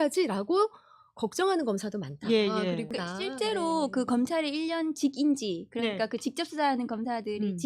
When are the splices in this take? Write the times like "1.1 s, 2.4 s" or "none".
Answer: 2.9 s